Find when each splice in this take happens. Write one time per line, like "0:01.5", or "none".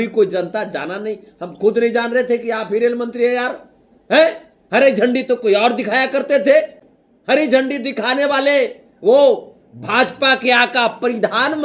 none